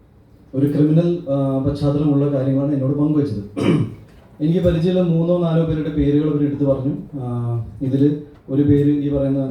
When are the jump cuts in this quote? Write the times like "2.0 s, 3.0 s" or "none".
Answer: none